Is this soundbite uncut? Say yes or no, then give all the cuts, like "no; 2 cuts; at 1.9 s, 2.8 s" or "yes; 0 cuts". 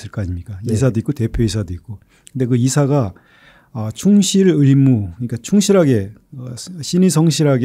yes; 0 cuts